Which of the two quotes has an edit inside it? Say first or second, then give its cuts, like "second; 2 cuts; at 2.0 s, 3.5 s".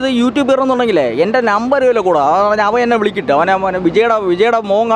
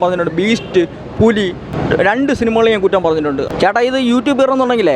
second; 2 cuts; at 1.7 s, 3.0 s